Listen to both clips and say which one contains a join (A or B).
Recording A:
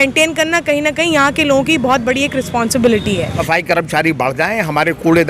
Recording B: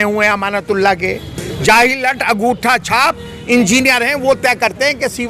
A